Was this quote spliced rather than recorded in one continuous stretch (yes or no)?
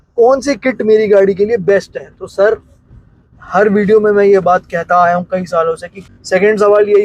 yes